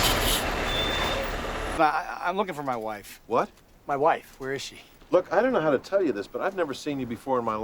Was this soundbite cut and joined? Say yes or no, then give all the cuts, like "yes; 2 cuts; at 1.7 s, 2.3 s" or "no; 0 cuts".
yes; 2 cuts; at 1.6 s, 4.9 s